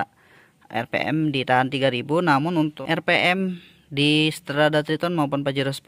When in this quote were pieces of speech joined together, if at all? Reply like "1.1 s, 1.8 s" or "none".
2.7 s